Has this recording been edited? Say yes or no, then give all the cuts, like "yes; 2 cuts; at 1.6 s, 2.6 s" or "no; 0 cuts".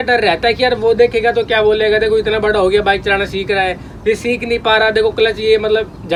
no; 0 cuts